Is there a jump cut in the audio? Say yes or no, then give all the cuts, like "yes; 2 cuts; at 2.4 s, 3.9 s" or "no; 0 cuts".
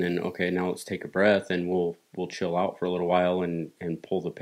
no; 0 cuts